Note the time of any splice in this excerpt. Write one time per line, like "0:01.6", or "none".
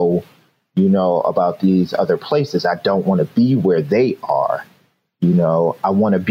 none